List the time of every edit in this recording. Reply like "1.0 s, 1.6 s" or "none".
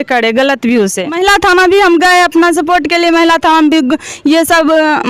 1.2 s